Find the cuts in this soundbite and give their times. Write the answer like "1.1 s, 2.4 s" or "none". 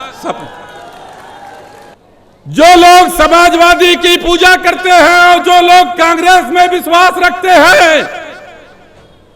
1.9 s